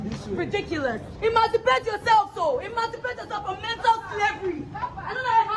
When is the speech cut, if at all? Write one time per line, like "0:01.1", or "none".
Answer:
none